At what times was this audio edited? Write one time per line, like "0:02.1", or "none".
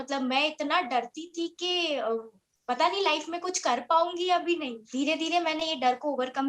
0:04.8